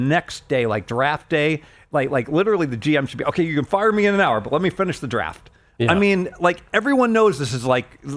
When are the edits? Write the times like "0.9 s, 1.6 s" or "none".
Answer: none